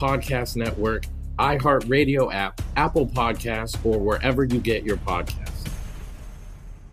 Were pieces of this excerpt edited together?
yes; 1 cut; at 1.0 s

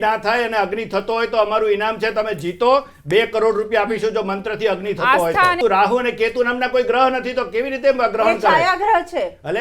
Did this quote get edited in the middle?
yes; 1 cut; at 5.6 s

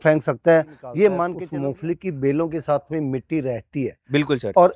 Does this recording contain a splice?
yes; 1 cut; at 1.4 s

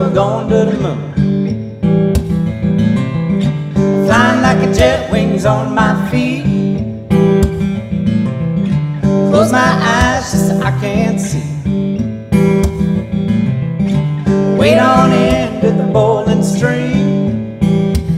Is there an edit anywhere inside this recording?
no; 0 cuts

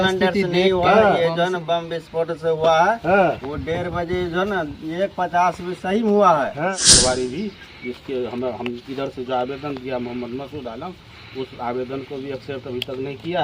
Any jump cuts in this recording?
yes; 1 cut; at 6.7 s

